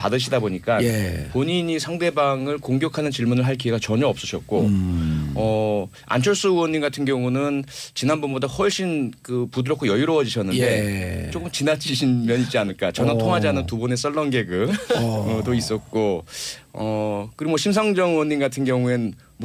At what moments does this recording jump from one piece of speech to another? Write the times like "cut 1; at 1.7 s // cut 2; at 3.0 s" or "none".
none